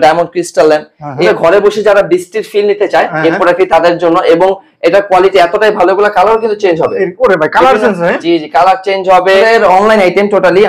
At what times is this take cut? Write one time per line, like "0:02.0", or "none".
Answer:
0:01.3
0:09.4